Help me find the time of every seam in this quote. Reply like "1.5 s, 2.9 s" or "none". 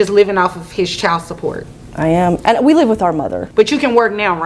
3.4 s

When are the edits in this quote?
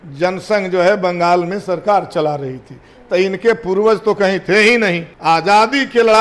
5.1 s

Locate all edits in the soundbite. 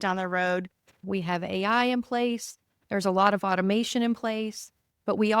1.0 s

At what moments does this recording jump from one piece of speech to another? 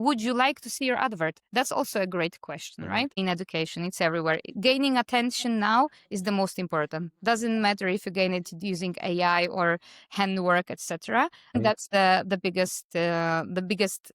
3.2 s, 11.5 s

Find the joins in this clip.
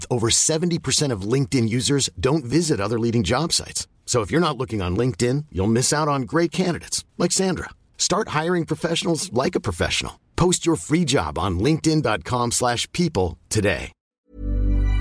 14.0 s

